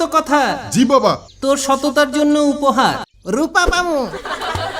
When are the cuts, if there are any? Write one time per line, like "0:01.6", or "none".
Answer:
0:01.3
0:03.1